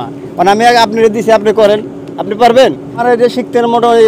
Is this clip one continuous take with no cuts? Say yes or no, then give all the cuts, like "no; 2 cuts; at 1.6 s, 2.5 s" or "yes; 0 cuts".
no; 1 cut; at 2.9 s